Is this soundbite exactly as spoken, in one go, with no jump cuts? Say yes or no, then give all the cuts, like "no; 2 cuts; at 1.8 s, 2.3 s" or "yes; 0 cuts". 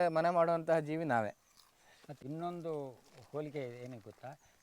no; 1 cut; at 2.1 s